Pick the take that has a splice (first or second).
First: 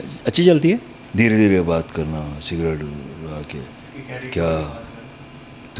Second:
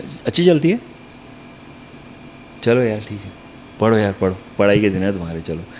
first